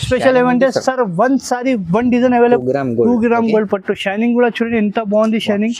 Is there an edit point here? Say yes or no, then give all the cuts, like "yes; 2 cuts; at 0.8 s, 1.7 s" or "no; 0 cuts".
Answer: yes; 1 cut; at 2.6 s